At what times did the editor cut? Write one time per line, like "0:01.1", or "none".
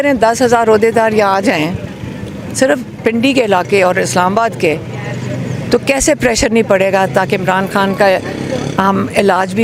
none